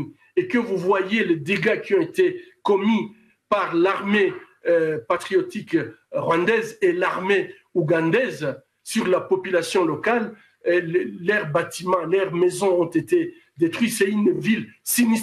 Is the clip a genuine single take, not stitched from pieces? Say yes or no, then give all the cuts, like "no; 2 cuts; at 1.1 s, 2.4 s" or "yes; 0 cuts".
yes; 0 cuts